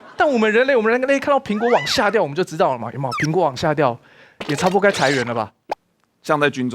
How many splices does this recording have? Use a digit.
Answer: 1